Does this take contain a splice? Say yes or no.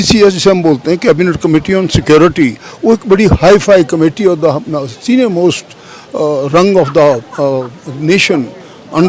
no